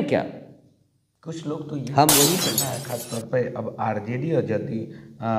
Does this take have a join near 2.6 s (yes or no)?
yes